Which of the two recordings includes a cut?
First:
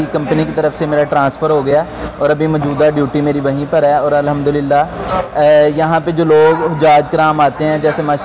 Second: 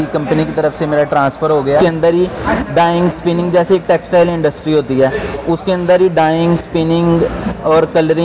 second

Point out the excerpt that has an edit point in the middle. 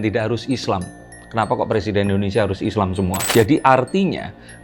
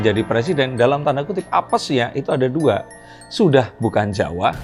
first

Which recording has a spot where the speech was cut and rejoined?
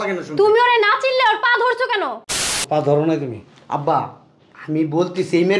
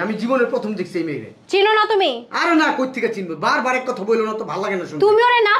first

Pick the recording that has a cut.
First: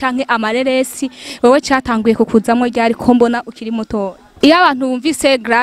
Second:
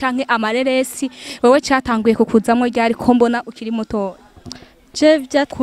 first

